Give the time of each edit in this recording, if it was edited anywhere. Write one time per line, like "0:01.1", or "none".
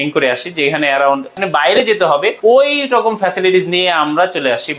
0:01.3
0:02.4